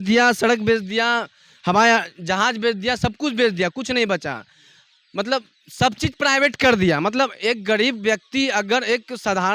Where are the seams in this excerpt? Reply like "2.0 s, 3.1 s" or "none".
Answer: none